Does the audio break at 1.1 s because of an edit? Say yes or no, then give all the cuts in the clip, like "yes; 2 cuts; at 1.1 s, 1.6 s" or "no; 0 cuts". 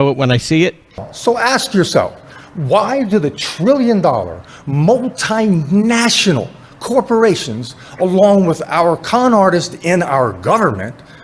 yes; 1 cut; at 1.1 s